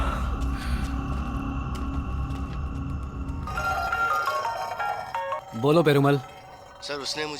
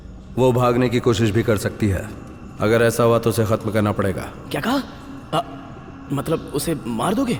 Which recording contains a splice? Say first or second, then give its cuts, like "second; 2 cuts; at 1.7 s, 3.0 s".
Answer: first; 1 cut; at 3.5 s